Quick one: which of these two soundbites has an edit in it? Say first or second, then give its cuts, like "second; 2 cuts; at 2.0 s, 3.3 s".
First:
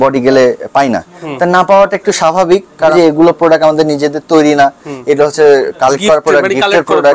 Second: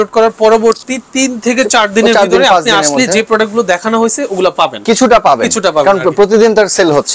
first; 1 cut; at 2.9 s